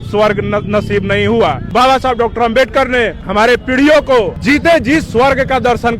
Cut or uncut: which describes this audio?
cut